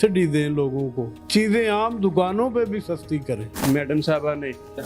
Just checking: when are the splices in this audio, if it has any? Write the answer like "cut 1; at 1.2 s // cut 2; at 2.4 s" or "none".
cut 1; at 3.5 s